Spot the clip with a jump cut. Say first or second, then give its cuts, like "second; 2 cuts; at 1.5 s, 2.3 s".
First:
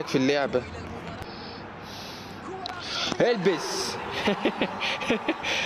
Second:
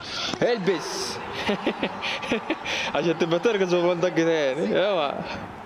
first; 1 cut; at 1.2 s